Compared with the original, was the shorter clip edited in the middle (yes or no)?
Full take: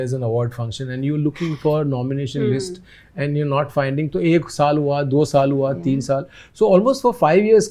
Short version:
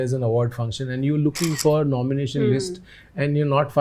no